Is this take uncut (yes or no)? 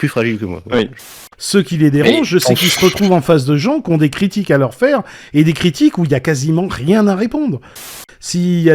no